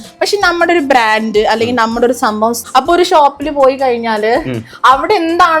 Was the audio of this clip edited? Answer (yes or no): yes